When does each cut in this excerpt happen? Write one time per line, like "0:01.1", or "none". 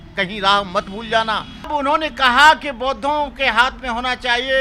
0:01.7